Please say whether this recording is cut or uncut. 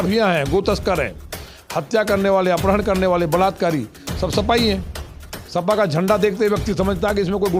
uncut